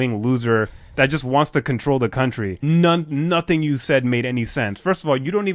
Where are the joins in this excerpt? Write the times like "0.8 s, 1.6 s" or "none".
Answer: 2.6 s